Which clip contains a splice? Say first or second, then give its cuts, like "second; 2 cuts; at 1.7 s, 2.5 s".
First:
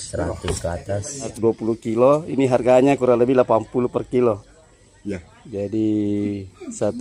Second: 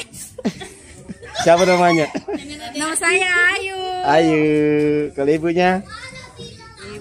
first; 1 cut; at 1.3 s